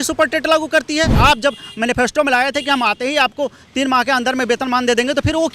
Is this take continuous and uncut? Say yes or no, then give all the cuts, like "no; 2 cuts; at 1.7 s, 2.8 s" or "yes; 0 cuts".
no; 1 cut; at 1.1 s